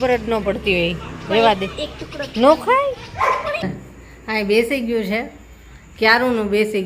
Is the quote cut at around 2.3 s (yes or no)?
no